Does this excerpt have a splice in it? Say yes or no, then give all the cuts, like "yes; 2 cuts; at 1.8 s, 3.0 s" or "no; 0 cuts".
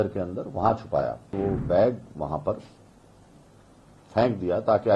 yes; 1 cut; at 1.3 s